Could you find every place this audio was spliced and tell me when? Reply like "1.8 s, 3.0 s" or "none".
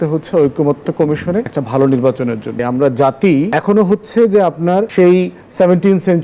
1.6 s, 2.6 s, 3.5 s, 4.9 s